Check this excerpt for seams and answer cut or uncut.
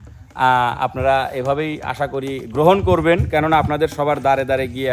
uncut